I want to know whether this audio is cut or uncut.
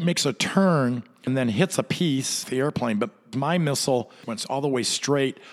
cut